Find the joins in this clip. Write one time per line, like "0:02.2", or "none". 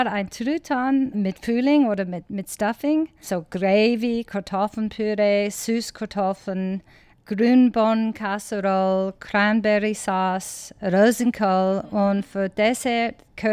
0:01.1
0:03.2
0:07.2